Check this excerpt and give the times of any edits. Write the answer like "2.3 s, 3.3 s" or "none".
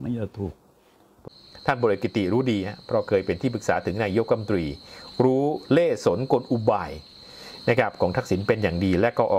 1.2 s

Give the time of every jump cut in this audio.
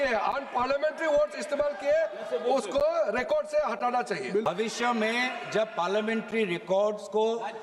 4.5 s

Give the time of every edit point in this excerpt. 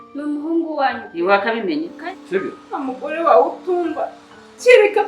1.9 s

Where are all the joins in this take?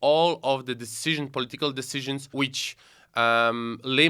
2.3 s

